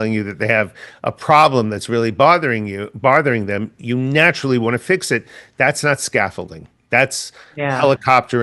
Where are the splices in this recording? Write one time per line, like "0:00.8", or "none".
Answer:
none